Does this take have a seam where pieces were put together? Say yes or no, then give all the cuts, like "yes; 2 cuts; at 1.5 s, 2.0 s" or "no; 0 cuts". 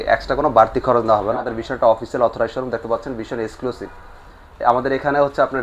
yes; 1 cut; at 1.4 s